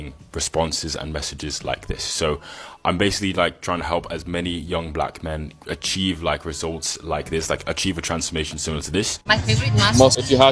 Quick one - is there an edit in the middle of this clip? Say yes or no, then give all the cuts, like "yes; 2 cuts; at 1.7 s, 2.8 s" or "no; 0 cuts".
yes; 1 cut; at 9.2 s